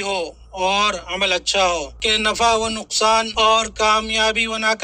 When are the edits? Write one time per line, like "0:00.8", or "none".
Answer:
0:01.9
0:03.3